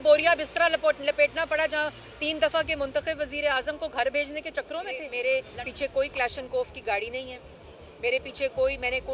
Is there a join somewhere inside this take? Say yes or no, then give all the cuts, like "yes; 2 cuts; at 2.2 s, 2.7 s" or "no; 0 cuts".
yes; 1 cut; at 5.1 s